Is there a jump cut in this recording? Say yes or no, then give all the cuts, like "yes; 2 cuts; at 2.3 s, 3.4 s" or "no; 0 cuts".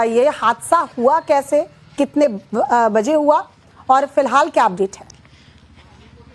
yes; 1 cut; at 1.8 s